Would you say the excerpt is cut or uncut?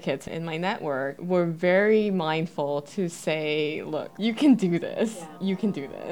cut